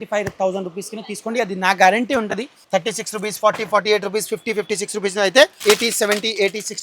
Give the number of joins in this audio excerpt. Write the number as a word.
two